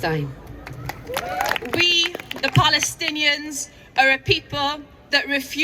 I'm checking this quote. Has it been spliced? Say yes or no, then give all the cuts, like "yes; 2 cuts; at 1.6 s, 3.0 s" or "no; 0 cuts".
yes; 1 cut; at 1.6 s